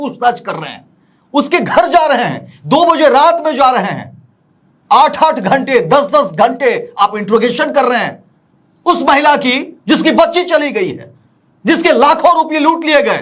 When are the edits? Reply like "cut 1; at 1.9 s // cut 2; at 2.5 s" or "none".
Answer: none